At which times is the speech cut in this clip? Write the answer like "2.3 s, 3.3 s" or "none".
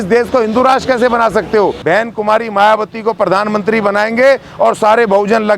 1.8 s